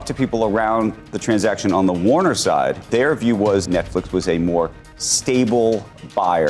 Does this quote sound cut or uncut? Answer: cut